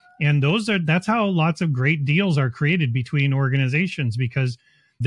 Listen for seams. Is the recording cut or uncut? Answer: uncut